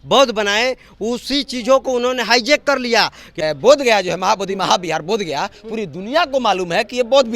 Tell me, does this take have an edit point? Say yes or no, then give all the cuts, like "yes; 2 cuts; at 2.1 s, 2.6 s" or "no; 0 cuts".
yes; 1 cut; at 3.4 s